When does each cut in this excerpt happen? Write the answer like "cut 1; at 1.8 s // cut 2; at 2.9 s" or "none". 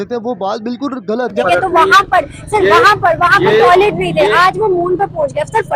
cut 1; at 1.3 s